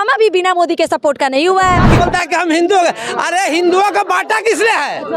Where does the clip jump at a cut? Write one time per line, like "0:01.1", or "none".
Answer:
0:01.9